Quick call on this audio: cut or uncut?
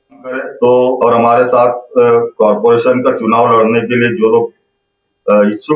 cut